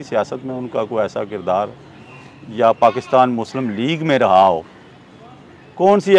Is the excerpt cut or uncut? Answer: uncut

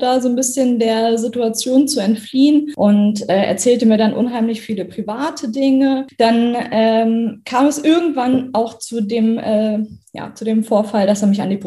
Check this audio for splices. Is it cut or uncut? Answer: cut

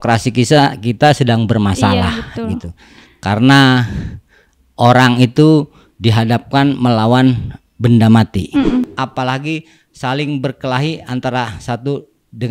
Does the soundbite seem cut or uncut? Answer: cut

